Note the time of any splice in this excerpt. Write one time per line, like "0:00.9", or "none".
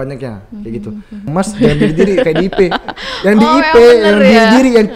0:01.3